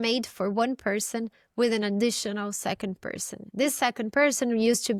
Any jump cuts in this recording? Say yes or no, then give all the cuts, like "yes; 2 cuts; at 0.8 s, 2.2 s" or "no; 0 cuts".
no; 0 cuts